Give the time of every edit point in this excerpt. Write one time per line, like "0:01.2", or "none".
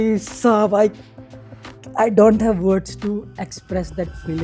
none